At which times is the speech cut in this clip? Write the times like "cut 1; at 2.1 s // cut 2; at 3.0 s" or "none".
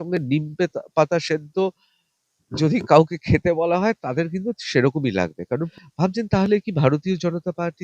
cut 1; at 5.7 s